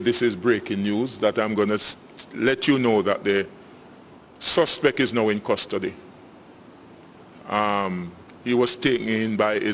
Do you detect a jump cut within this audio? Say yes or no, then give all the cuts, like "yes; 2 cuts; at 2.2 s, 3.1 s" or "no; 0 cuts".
no; 0 cuts